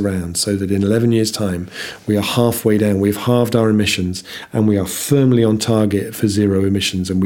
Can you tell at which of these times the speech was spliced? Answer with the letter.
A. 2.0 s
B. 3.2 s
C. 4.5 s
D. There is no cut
D